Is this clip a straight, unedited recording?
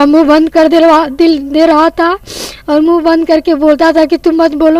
yes; 0 cuts

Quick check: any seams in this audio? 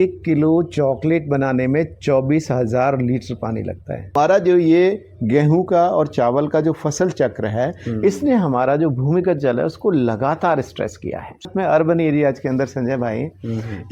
yes; 2 cuts; at 4.1 s, 11.5 s

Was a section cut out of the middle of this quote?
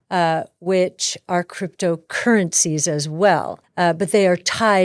yes; 1 cut; at 3.6 s

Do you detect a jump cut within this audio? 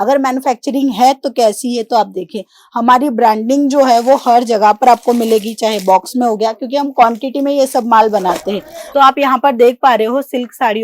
yes; 1 cut; at 8.9 s

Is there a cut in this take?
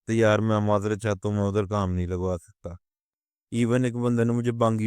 yes; 1 cut; at 3.2 s

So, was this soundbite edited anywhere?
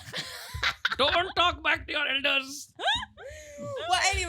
no; 0 cuts

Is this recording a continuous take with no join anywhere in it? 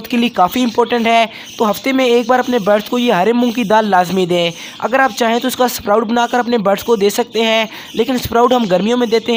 yes; 0 cuts

